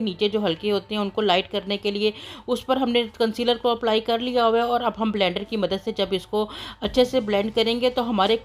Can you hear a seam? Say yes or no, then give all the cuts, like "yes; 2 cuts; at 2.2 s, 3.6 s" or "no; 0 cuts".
no; 0 cuts